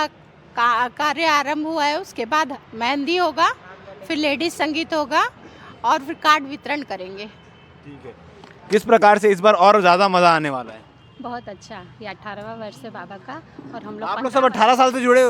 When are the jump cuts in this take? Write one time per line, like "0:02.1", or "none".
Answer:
none